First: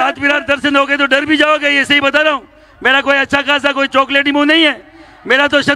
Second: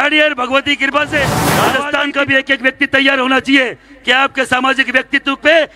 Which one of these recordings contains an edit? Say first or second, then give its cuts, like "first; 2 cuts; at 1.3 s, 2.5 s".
second; 1 cut; at 1.4 s